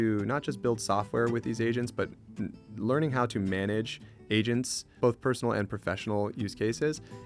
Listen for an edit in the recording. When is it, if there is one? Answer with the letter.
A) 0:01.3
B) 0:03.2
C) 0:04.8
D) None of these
C